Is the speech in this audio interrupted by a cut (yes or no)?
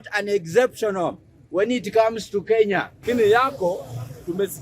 yes